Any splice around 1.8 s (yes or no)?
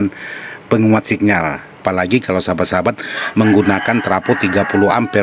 yes